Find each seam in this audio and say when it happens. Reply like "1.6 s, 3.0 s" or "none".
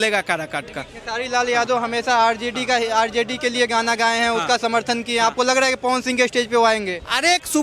none